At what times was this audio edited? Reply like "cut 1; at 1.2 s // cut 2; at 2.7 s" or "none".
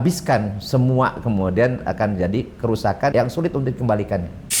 cut 1; at 1.8 s // cut 2; at 3.1 s